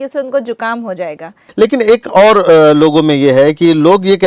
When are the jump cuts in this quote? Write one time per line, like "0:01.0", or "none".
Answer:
0:01.4